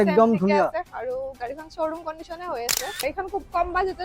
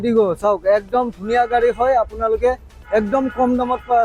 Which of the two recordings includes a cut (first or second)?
first